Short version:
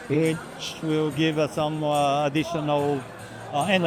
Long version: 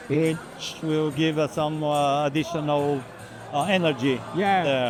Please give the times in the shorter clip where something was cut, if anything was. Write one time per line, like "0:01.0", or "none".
none